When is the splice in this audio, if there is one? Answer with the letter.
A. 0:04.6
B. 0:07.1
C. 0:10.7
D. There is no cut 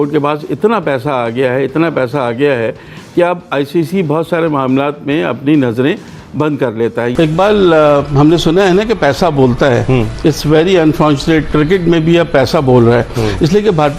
B